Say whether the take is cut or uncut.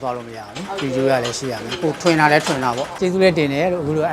cut